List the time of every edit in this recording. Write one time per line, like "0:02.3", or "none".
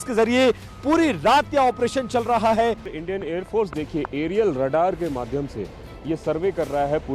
0:02.9